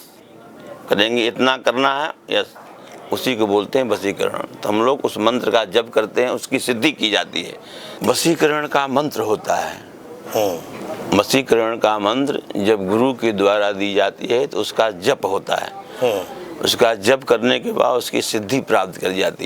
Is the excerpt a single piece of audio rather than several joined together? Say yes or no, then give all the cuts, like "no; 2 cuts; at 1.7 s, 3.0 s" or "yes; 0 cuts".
no; 1 cut; at 8.0 s